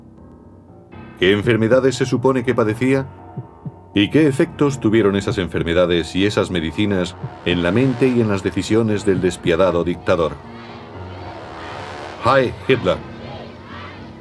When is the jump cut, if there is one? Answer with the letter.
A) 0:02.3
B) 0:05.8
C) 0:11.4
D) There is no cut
D